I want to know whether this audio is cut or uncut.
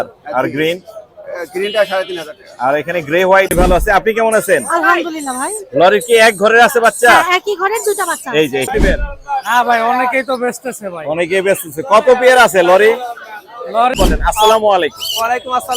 cut